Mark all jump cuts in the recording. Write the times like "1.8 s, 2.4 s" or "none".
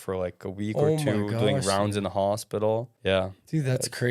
2.9 s